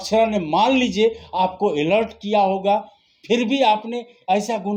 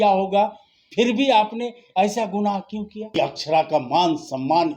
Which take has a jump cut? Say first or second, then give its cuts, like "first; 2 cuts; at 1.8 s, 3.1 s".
second; 1 cut; at 3.4 s